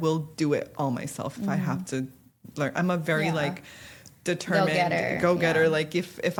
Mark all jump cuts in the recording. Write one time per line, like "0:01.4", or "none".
none